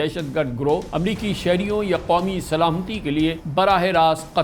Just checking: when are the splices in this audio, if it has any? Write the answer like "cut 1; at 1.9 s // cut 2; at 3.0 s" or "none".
cut 1; at 0.9 s // cut 2; at 3.4 s